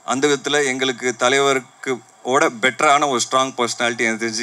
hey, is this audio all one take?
yes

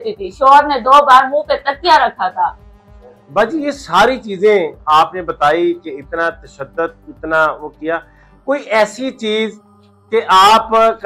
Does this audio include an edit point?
no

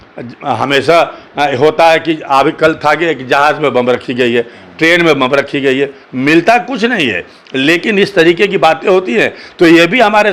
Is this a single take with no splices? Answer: yes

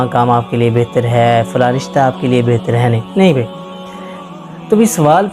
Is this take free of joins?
no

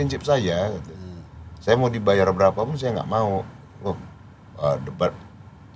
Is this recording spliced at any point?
no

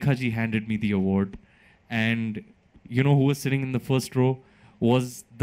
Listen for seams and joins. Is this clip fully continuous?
yes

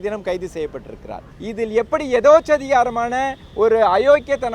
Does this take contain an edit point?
yes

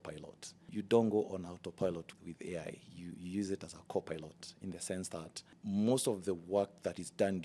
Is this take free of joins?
yes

